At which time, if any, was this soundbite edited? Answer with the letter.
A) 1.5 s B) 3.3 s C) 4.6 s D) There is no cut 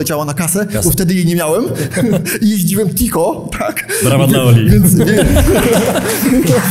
D